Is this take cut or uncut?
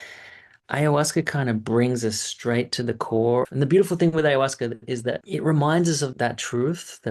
cut